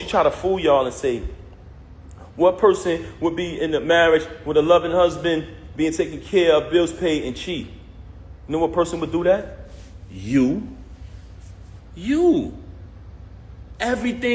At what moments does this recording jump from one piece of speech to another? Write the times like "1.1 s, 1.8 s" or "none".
none